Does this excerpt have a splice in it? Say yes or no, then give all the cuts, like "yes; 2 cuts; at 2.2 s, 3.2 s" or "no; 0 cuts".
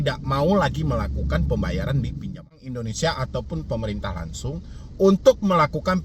yes; 1 cut; at 2.6 s